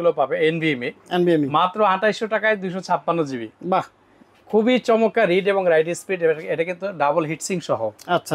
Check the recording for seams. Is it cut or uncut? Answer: uncut